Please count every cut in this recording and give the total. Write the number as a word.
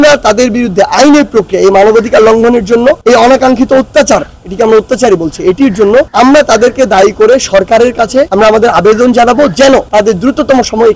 zero